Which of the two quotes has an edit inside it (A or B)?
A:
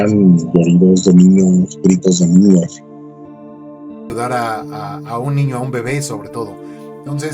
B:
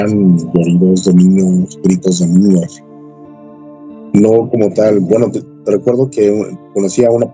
A